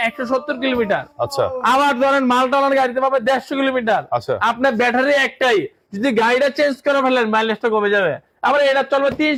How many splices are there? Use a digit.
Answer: 0